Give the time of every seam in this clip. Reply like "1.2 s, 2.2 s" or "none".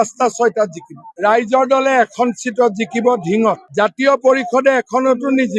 none